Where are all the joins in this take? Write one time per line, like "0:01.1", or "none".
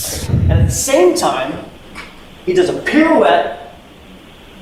none